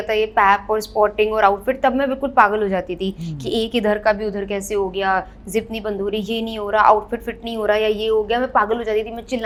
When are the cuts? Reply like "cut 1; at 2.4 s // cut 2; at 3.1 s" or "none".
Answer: none